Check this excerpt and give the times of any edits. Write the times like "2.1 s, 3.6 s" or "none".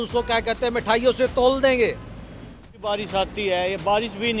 2.7 s